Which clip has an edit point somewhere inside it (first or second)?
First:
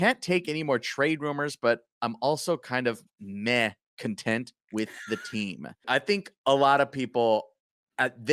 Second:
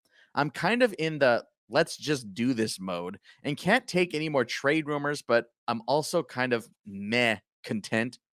first